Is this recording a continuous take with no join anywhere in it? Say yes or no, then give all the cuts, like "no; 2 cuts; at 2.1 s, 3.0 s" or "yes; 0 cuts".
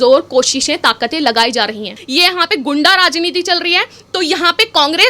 no; 1 cut; at 2.0 s